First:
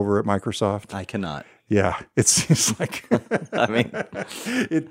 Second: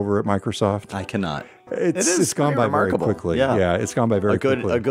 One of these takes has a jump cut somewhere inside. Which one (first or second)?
second